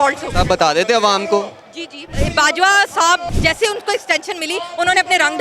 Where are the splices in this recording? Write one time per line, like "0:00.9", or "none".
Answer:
0:02.1
0:03.3